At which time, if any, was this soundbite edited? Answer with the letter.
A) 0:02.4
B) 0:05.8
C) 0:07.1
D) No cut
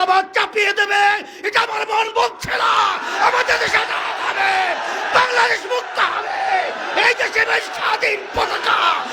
D